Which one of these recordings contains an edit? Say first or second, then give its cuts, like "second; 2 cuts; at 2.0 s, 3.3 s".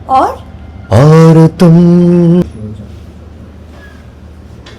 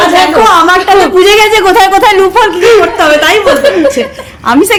first; 1 cut; at 2.4 s